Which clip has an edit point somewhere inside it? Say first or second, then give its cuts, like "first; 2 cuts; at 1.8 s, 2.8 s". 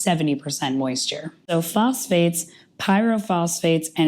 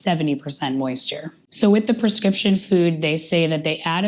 first; 1 cut; at 1.4 s